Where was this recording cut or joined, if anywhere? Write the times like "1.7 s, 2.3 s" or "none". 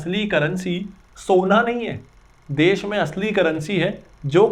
none